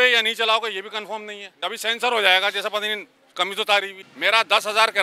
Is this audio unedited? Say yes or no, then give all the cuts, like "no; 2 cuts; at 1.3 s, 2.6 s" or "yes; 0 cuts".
no; 2 cuts; at 1.6 s, 4.0 s